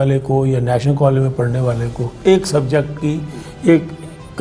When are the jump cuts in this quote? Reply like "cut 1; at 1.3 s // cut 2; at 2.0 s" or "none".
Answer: cut 1; at 2.1 s